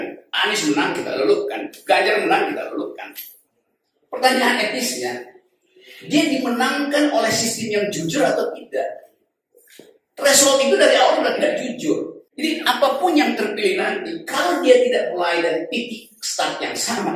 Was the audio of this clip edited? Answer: yes; 1 cut; at 12.2 s

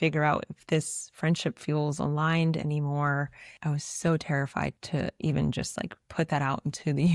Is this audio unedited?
no; 1 cut; at 3.4 s

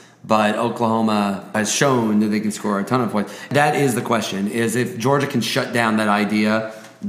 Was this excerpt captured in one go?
no; 2 cuts; at 1.5 s, 3.5 s

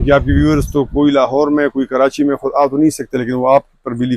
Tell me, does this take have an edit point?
no; 0 cuts

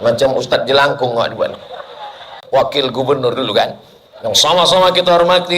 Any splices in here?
yes; 1 cut; at 2.4 s

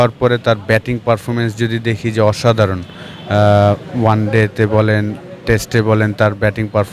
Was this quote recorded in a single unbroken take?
yes; 0 cuts

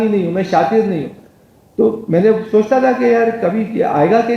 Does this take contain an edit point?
no; 0 cuts

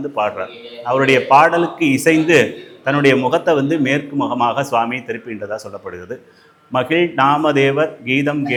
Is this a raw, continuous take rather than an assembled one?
yes; 0 cuts

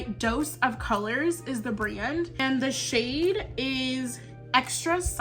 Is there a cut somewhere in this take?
yes; 1 cut; at 2.4 s

